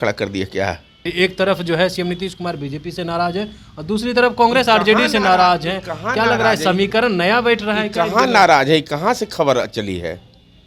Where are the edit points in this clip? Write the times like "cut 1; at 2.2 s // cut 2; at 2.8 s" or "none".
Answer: cut 1; at 1.1 s